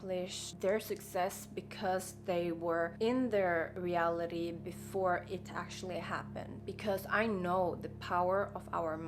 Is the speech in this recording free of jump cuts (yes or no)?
no